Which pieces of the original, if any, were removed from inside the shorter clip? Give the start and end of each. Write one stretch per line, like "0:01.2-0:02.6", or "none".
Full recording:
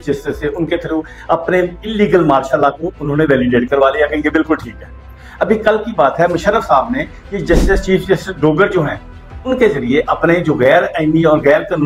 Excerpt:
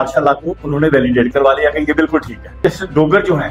0:04.9-0:08.0